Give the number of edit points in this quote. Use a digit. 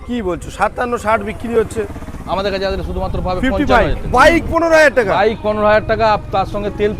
1